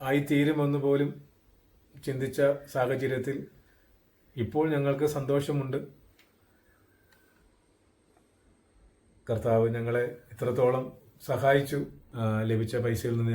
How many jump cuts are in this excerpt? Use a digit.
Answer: 1